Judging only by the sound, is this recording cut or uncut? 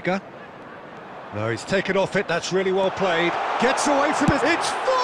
uncut